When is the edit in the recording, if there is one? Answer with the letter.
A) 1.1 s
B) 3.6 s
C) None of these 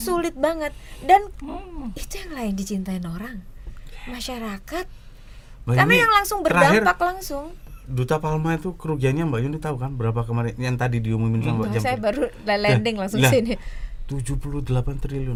C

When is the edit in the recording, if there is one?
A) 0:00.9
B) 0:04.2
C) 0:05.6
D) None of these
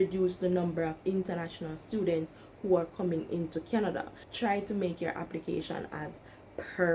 B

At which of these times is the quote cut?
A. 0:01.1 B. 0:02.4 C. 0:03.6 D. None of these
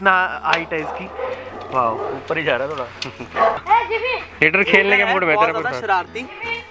C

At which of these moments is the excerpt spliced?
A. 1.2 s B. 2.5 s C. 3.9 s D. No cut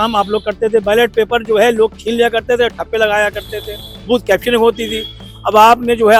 D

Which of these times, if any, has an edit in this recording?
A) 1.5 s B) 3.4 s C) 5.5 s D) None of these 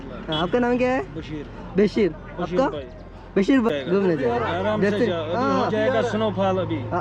B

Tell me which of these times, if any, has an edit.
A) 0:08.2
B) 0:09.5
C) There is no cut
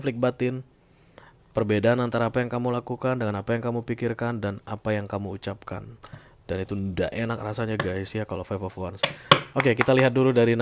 C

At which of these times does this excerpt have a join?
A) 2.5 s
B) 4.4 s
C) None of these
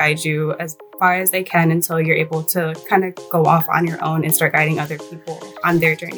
C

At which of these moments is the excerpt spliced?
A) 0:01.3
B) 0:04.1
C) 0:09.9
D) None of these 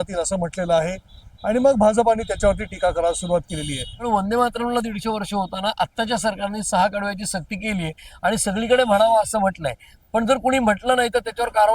B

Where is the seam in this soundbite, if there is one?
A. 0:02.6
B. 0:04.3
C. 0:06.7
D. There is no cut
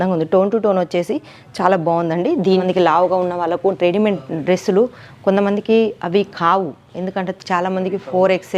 A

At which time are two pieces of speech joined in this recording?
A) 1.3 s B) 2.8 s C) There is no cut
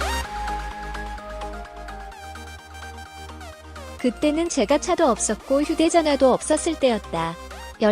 C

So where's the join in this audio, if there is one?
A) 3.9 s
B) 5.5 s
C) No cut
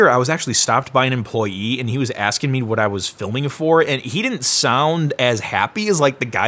C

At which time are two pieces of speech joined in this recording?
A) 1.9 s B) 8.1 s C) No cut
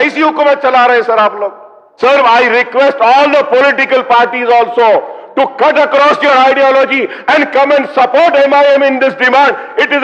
A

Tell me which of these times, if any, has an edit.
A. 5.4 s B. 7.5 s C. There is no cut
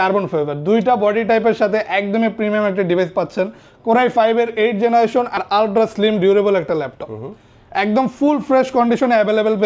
A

